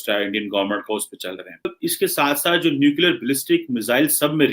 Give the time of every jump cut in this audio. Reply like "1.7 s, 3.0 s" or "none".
1.7 s